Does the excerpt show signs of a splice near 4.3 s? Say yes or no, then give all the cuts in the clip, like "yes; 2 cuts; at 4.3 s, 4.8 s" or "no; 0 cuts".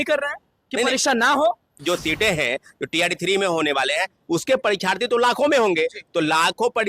no; 1 cut; at 1.8 s